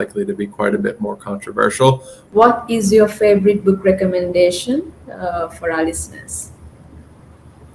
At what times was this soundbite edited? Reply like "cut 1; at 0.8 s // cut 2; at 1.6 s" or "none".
cut 1; at 2.1 s